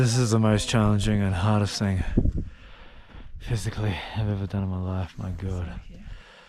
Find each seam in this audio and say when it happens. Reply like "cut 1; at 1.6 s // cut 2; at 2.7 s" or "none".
none